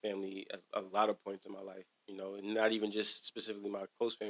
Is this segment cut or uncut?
uncut